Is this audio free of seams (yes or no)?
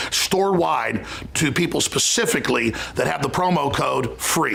yes